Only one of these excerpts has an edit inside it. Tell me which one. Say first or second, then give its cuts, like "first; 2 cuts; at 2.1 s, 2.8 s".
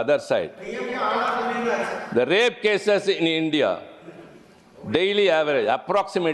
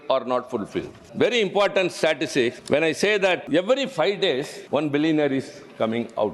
second; 4 cuts; at 1.0 s, 2.6 s, 3.4 s, 4.6 s